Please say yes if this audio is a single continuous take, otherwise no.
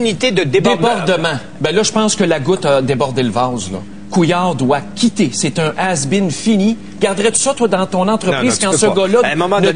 no